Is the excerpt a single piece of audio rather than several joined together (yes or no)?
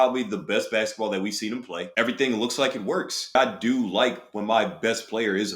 no